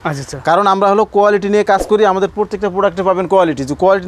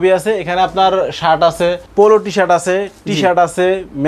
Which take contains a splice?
second; 1 cut; at 1.8 s

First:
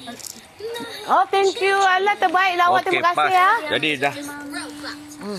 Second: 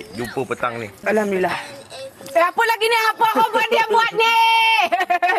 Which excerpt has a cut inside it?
second; 1 cut; at 1.0 s

